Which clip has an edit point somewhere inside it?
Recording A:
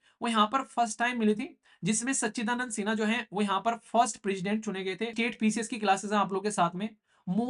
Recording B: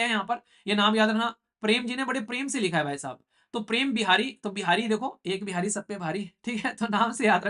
A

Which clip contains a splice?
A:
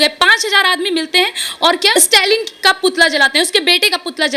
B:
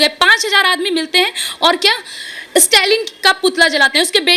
A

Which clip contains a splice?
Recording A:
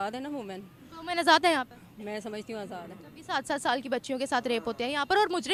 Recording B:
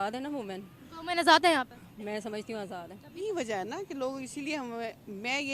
B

